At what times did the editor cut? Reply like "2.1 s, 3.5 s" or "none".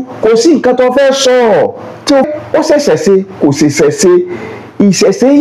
2.3 s